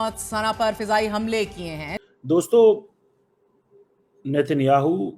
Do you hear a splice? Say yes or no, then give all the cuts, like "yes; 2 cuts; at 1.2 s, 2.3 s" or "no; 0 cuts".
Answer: yes; 1 cut; at 1.9 s